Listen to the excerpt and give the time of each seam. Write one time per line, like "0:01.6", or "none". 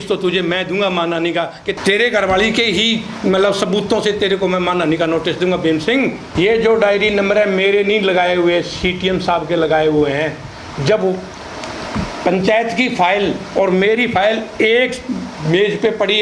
0:01.8
0:06.2

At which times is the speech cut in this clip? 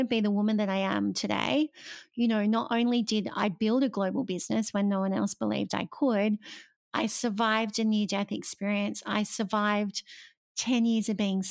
none

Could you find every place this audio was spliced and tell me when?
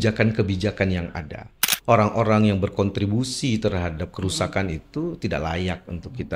0:01.7

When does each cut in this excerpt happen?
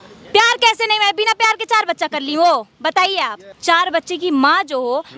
0:03.4

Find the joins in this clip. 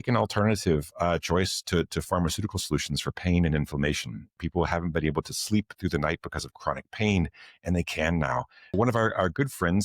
0:04.3
0:08.7

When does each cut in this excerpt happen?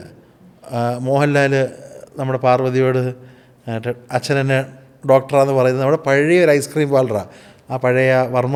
none

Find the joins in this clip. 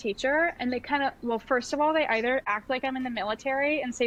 none

